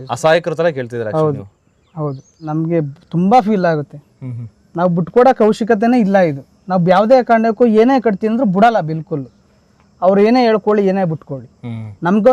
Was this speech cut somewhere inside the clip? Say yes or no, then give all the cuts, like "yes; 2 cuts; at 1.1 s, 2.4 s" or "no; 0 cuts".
yes; 1 cut; at 2.5 s